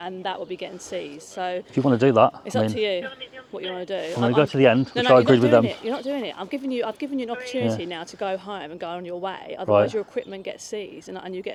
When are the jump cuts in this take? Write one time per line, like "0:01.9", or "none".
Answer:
none